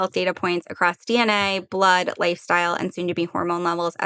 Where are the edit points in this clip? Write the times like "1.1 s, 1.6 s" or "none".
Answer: none